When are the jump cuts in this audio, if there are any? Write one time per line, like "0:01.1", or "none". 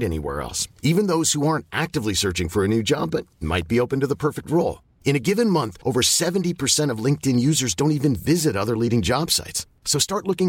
none